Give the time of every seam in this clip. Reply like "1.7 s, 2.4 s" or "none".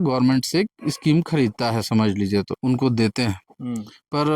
2.5 s